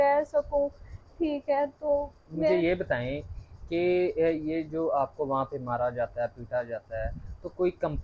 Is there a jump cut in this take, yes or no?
no